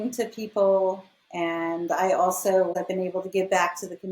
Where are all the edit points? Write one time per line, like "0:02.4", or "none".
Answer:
0:02.7